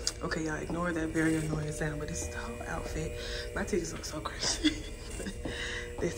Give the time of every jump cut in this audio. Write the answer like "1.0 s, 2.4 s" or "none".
none